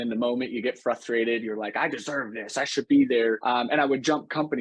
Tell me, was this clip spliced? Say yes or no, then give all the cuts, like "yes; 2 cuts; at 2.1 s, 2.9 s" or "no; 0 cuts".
yes; 1 cut; at 3.4 s